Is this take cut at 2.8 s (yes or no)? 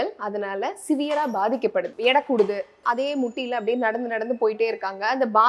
yes